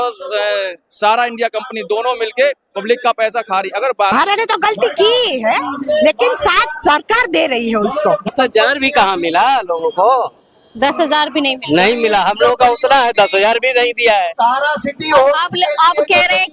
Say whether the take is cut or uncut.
cut